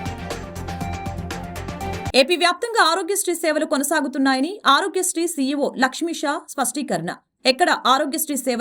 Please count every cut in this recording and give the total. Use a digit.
1